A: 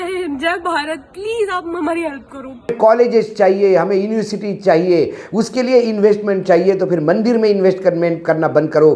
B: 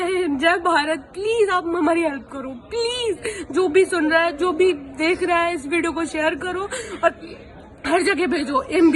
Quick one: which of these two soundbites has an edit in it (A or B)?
A